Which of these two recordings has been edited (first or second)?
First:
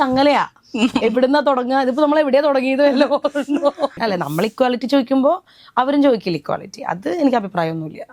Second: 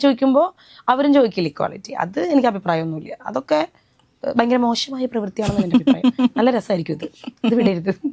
first